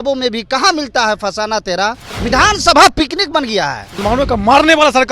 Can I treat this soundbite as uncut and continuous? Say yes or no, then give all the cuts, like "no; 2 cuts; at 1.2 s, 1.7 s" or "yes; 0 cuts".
no; 2 cuts; at 2.1 s, 3.9 s